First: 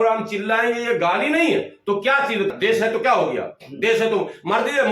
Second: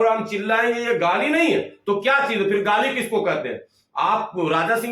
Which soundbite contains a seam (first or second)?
first